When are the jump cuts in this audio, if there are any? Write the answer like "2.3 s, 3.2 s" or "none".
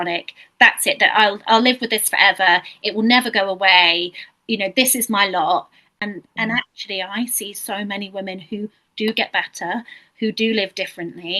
5.8 s